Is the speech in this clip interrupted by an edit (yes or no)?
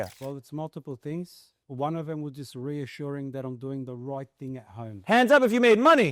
yes